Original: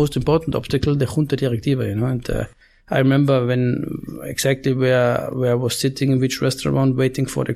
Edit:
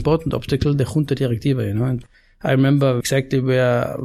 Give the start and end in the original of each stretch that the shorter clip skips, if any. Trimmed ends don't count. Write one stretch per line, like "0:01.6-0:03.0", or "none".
0:02.2-0:02.5
0:03.5-0:04.3